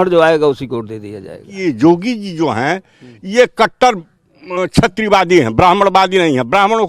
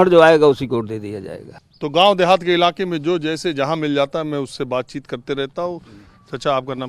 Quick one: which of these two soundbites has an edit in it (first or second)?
first